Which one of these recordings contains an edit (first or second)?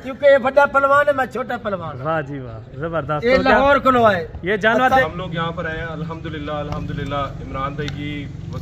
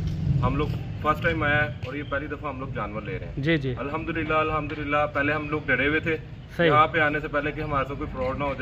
first